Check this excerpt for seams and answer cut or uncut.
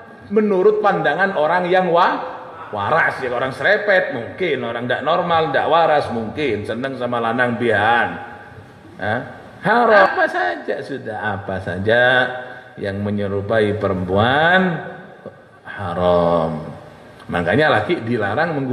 cut